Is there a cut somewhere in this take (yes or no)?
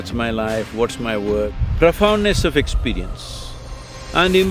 yes